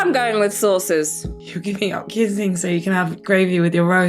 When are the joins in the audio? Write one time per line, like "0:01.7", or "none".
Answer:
0:01.3